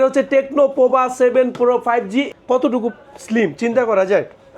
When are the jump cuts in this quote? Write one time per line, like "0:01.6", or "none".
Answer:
0:02.3